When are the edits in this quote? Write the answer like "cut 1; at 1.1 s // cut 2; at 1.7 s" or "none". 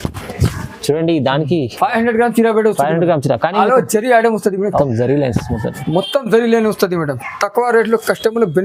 cut 1; at 4.8 s